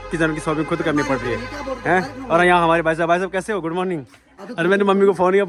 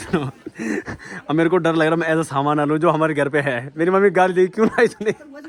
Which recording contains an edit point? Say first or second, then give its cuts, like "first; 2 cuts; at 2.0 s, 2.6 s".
first; 1 cut; at 4.3 s